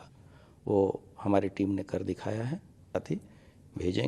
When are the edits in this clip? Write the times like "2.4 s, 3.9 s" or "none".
2.9 s